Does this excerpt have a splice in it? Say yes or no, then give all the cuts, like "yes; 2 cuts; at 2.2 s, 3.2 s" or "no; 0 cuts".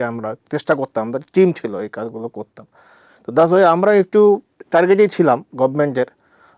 no; 0 cuts